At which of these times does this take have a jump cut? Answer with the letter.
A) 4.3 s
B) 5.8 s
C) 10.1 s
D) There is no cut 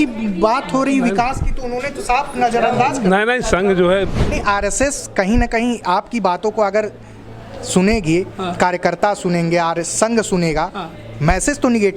A